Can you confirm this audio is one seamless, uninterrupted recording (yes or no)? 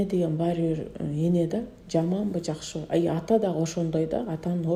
yes